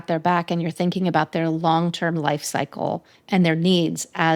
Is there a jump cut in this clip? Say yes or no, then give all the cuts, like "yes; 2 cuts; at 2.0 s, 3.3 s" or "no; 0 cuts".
no; 0 cuts